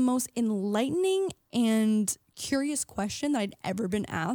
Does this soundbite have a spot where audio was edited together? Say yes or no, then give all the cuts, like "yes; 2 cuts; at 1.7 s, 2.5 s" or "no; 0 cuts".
no; 0 cuts